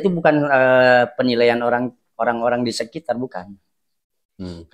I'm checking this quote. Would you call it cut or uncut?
uncut